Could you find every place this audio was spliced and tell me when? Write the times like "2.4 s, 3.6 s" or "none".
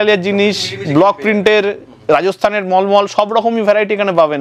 none